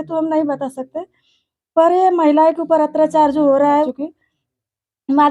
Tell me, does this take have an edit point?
yes; 1 cut; at 3.9 s

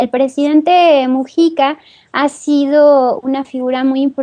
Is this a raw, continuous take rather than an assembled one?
no; 1 cut; at 1.5 s

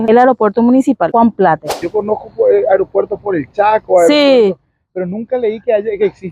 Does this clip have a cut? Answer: yes; 2 cuts; at 1.1 s, 1.8 s

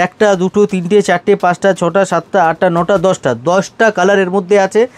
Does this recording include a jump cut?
no; 0 cuts

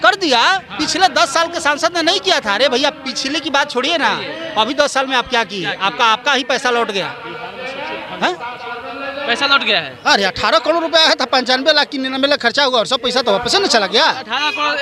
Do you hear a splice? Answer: no; 0 cuts

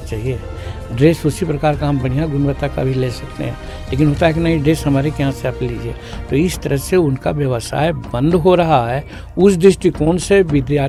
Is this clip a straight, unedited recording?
yes; 0 cuts

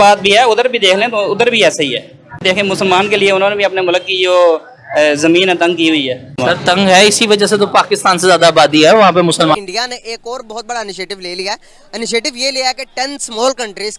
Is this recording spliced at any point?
yes; 1 cut; at 9.6 s

